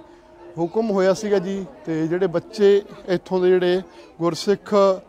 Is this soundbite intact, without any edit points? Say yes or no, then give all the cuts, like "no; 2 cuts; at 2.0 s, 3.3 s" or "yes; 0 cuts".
yes; 0 cuts